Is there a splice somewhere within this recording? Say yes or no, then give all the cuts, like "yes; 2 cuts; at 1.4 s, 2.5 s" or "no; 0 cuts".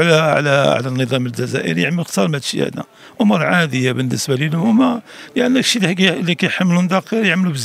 no; 0 cuts